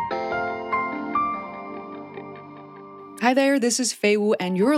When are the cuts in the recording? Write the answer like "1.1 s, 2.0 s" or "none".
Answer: 3.2 s